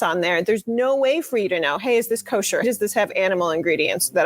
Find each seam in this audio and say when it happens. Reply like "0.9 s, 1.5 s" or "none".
2.6 s